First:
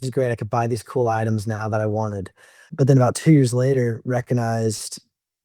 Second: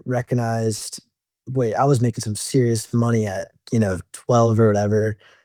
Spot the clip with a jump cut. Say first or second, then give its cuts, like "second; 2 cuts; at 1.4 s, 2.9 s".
first; 1 cut; at 2.7 s